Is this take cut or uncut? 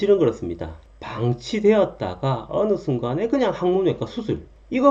uncut